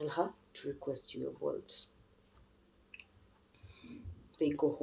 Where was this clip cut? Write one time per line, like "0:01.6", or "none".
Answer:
none